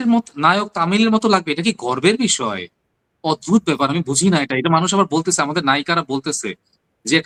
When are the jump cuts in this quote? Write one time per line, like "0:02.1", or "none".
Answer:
none